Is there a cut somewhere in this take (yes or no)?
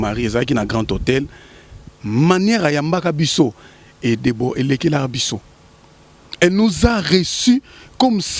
no